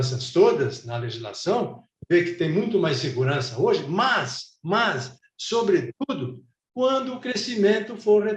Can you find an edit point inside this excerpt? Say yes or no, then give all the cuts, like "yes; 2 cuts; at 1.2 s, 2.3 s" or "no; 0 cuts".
no; 0 cuts